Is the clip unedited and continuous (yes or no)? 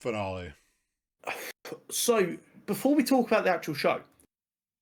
yes